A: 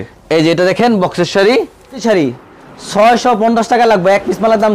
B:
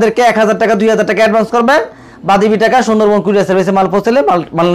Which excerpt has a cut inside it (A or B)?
A